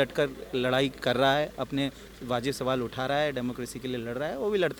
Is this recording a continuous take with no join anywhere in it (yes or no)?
yes